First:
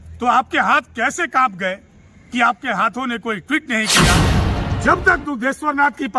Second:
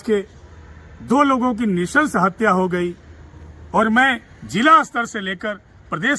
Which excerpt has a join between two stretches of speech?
first; 1 cut; at 4.3 s

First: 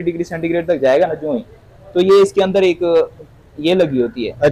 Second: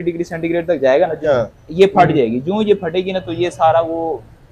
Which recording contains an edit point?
second; 1 cut; at 1.3 s

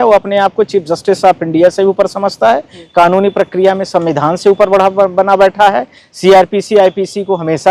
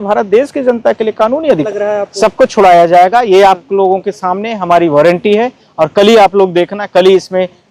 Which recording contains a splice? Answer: second; 1 cut; at 1.7 s

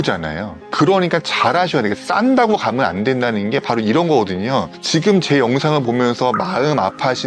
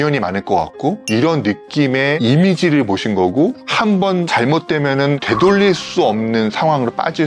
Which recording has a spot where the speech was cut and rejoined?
second; 4 cuts; at 1.0 s, 2.2 s, 3.8 s, 5.2 s

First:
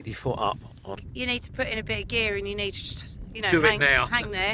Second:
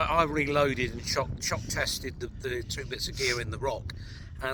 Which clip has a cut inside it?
first; 1 cut; at 1.0 s

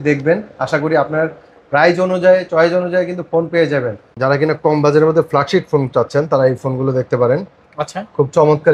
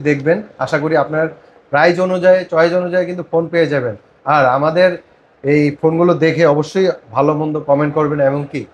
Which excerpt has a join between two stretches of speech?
first; 1 cut; at 4.1 s

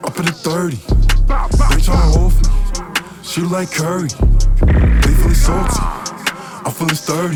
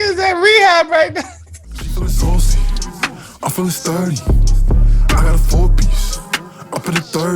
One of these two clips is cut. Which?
second; 1 cut; at 1.8 s

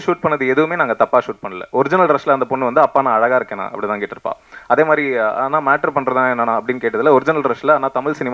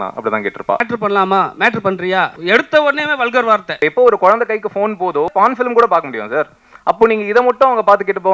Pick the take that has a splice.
second; 4 cuts; at 0.9 s, 2.4 s, 3.8 s, 5.3 s

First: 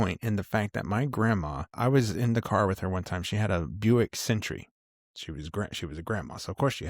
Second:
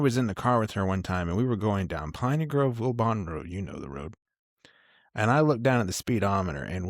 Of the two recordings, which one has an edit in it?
first; 1 cut; at 1.7 s

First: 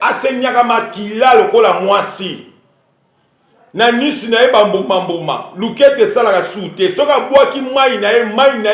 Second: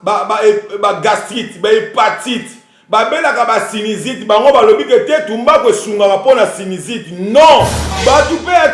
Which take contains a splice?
second; 1 cut; at 7.8 s

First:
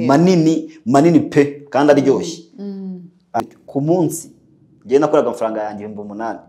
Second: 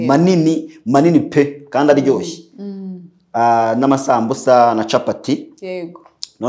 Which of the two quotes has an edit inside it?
first; 1 cut; at 3.4 s

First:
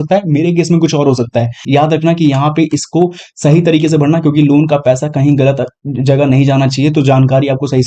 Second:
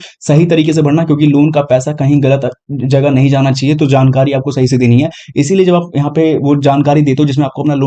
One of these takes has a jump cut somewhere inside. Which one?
first; 1 cut; at 1.6 s

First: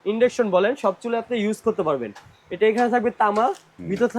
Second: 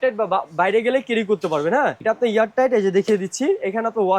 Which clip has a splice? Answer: second; 1 cut; at 2.0 s

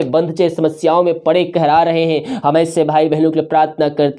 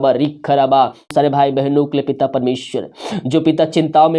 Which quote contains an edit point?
second; 1 cut; at 1.1 s

